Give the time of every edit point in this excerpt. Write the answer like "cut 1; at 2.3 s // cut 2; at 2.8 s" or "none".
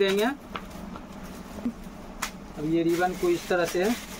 cut 1; at 1.6 s